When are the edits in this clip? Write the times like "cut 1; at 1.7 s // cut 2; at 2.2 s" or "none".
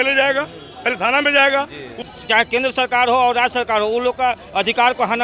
cut 1; at 2.1 s